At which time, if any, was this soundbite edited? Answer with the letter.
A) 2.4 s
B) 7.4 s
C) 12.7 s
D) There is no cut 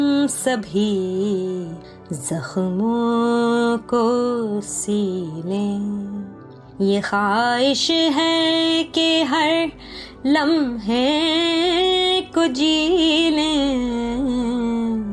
D